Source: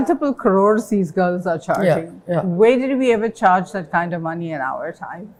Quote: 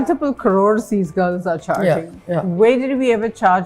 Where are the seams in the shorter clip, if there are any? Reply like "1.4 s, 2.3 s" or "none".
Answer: none